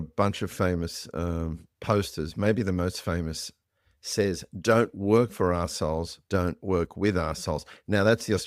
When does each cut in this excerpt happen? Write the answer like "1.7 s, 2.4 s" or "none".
none